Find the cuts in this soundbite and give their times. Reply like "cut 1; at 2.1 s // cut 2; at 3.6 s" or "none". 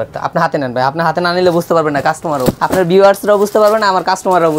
cut 1; at 2.6 s